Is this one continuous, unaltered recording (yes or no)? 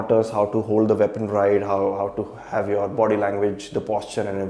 yes